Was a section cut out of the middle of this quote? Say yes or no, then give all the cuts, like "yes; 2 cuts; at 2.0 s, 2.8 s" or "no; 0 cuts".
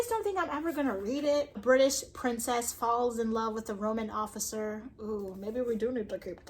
yes; 1 cut; at 1.5 s